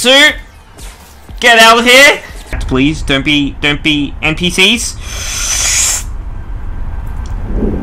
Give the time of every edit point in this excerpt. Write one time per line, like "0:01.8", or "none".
0:02.6